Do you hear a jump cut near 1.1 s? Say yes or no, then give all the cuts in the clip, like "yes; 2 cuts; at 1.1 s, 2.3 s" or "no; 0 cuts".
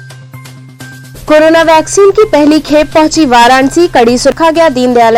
yes; 1 cut; at 1.1 s